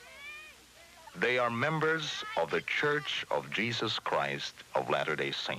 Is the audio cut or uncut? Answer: cut